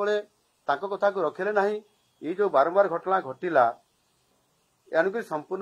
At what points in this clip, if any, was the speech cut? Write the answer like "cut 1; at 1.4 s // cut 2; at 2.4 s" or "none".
none